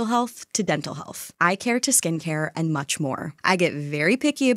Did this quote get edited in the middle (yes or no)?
yes